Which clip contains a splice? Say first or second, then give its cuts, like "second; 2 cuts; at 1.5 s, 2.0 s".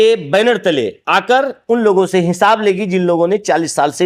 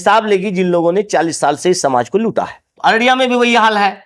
second; 1 cut; at 2.6 s